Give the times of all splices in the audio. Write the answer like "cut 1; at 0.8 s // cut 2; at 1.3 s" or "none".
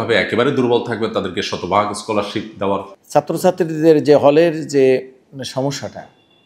cut 1; at 2.9 s